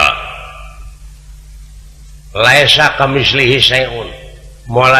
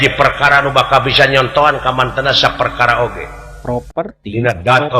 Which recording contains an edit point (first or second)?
second